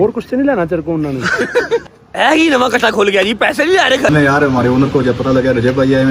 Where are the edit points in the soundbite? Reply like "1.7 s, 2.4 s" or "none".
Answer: 1.9 s, 4.1 s